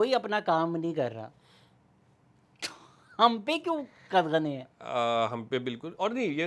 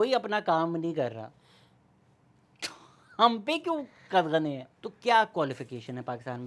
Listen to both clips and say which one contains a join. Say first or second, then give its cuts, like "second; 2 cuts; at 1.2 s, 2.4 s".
second; 1 cut; at 4.7 s